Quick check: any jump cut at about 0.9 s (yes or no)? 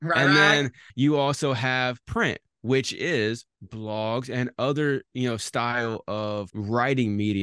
yes